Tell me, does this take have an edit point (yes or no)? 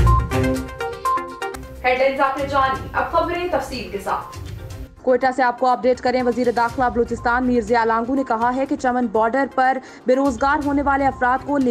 no